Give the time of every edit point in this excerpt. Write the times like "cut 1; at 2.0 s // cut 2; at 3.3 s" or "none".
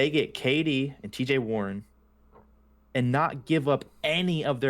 none